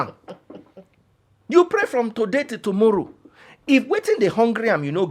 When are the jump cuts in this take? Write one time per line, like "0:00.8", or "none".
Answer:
none